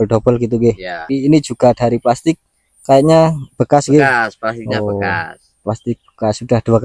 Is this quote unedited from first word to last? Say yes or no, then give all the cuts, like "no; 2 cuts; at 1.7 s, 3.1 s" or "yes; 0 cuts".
no; 1 cut; at 0.9 s